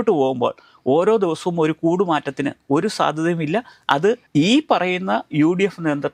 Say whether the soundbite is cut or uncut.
uncut